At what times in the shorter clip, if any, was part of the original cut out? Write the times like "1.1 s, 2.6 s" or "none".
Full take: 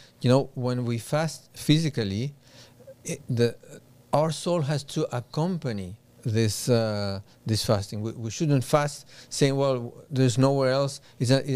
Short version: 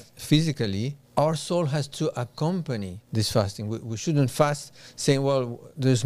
1.0 s, 3.0 s